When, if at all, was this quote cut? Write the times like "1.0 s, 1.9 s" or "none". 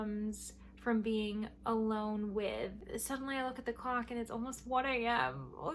2.8 s

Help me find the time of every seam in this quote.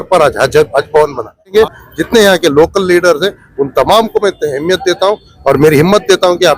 1.5 s

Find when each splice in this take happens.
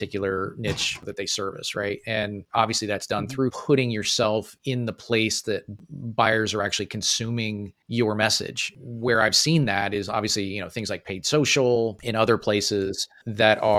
3.6 s, 8.7 s

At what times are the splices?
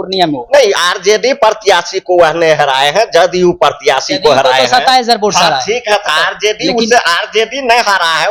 none

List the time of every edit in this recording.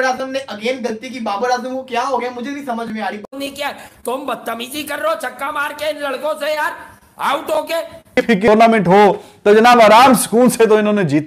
3.2 s, 8.2 s

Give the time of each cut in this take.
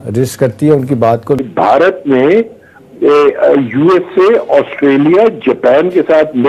1.5 s

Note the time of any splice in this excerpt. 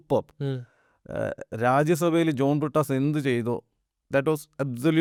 none

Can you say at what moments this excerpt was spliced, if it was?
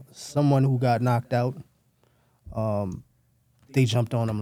none

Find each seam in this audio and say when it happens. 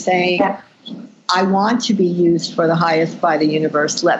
none

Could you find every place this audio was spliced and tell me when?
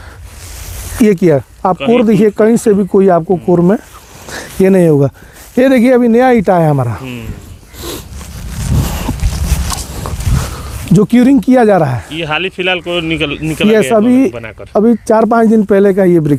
none

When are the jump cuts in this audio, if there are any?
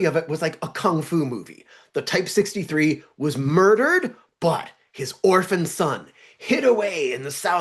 none

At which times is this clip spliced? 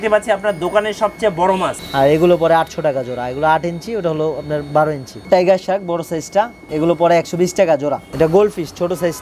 1.8 s, 5.1 s, 6.6 s, 8.1 s

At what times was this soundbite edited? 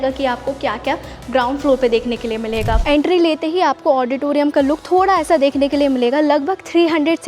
2.8 s

